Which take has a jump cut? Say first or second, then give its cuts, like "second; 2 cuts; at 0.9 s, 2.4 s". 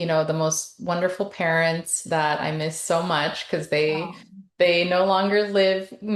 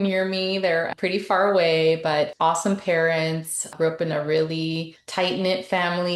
second; 4 cuts; at 0.9 s, 2.3 s, 3.7 s, 5.0 s